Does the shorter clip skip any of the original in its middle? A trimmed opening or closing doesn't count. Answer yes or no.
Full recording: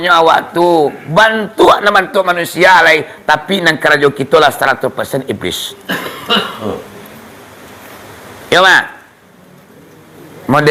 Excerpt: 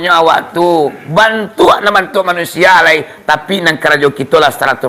no